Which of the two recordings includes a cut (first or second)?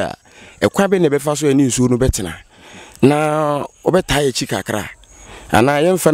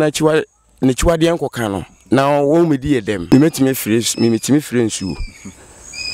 second